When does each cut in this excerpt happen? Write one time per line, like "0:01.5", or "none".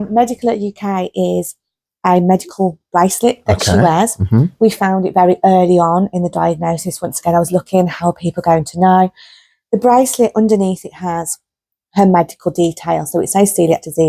none